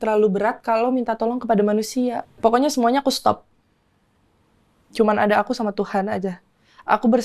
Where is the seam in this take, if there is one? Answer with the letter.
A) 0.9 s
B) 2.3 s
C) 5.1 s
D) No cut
B